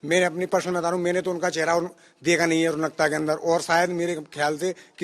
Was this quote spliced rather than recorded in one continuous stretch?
no; 0 cuts

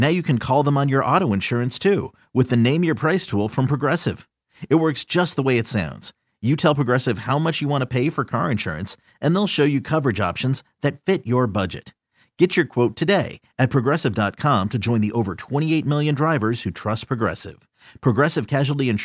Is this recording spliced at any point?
no; 0 cuts

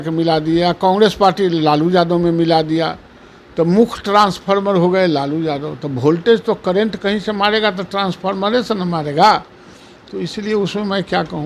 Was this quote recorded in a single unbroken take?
yes; 0 cuts

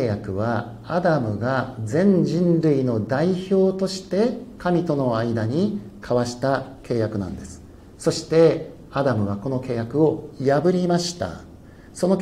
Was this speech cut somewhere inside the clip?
no; 0 cuts

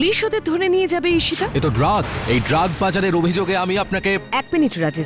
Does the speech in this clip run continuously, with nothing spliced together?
no; 1 cut; at 1.5 s

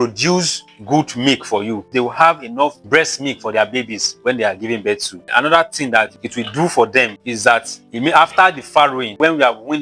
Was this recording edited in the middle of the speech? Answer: yes; 1 cut; at 1.9 s

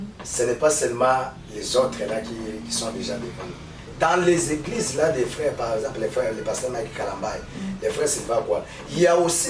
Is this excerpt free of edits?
no; 1 cut; at 3.9 s

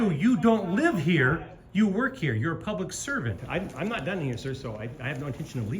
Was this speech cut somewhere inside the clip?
yes; 1 cut; at 3.4 s

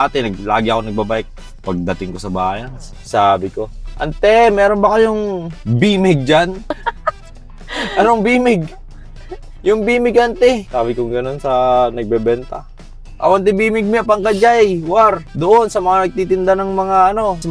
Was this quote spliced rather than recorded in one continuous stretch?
no; 0 cuts

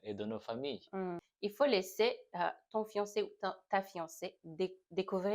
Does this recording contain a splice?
yes; 1 cut; at 1.2 s

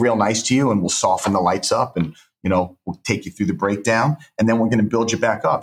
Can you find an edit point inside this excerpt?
no; 0 cuts

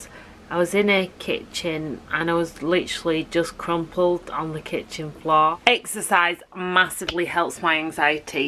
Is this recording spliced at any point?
yes; 1 cut; at 5.6 s

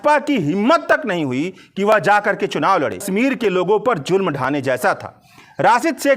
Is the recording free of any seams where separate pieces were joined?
no; 1 cut; at 3.1 s

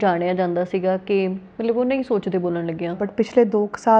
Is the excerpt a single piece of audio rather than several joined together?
no; 1 cut; at 3.1 s

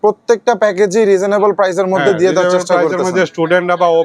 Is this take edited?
no; 0 cuts

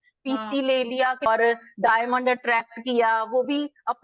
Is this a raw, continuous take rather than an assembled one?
no; 1 cut; at 1.3 s

